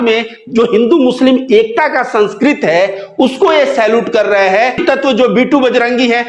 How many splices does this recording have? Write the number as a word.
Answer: one